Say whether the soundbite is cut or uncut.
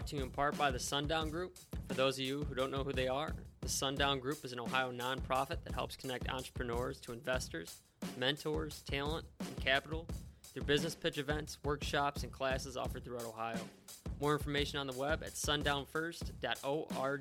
uncut